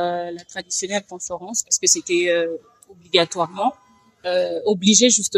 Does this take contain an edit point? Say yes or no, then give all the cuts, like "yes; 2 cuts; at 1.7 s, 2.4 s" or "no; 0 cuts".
no; 0 cuts